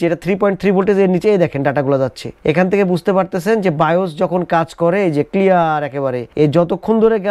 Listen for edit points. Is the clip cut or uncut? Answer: uncut